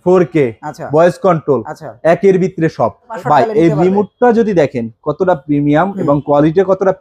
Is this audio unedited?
no; 1 cut; at 3.1 s

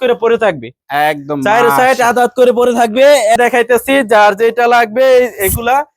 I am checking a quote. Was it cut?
yes; 1 cut; at 3.4 s

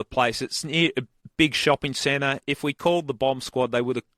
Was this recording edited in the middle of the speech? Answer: yes; 1 cut; at 1.1 s

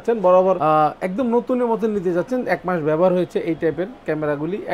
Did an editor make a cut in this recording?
no; 0 cuts

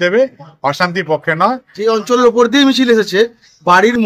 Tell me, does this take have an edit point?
yes; 1 cut; at 1.7 s

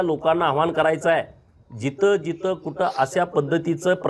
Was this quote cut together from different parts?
no; 0 cuts

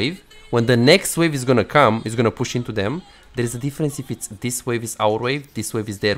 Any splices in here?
no; 0 cuts

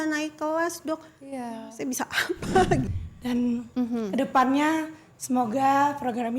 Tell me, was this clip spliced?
yes; 1 cut; at 2.9 s

